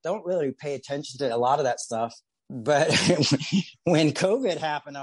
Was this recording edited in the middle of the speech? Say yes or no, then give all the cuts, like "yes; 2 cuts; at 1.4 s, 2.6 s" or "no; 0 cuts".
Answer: yes; 1 cut; at 2.4 s